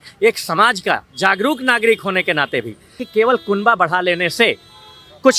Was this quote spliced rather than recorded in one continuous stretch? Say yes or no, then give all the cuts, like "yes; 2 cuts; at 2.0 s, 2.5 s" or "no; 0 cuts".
yes; 1 cut; at 3.0 s